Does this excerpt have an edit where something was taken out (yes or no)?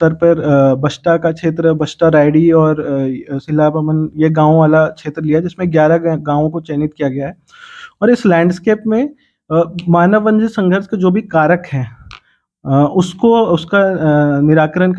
no